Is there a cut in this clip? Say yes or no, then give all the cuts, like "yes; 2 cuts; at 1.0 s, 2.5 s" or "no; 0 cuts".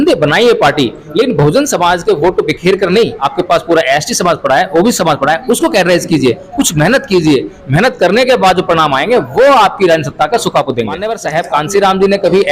yes; 2 cuts; at 3.2 s, 11.1 s